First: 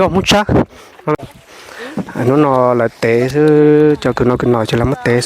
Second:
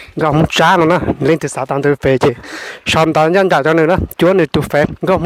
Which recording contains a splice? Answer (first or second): first